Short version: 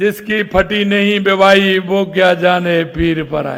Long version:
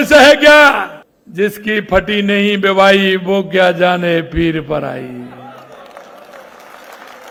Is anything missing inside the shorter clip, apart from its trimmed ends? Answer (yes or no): no